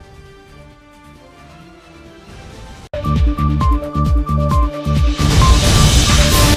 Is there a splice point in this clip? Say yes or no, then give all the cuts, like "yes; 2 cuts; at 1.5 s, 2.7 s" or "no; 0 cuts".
no; 0 cuts